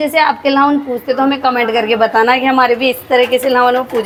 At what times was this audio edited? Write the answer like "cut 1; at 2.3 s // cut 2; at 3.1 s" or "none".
none